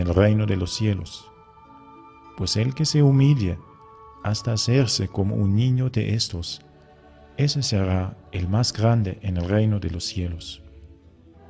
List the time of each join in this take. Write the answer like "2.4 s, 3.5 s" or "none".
none